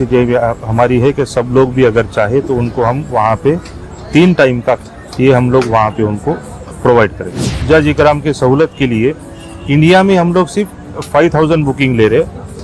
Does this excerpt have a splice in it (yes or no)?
yes